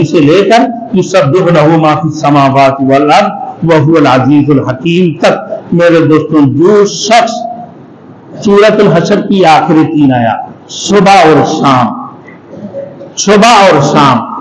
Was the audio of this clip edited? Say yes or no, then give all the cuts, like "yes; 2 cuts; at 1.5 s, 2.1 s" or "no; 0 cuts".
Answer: no; 0 cuts